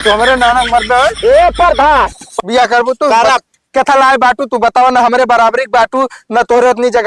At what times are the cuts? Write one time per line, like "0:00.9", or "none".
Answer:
0:02.2